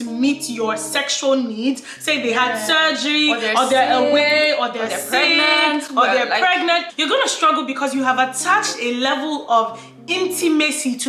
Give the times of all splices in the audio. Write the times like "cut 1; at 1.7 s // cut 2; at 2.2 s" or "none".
cut 1; at 6.9 s